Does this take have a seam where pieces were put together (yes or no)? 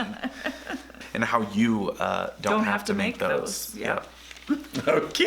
yes